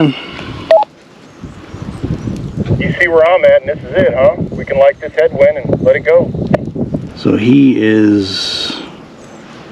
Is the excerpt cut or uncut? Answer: cut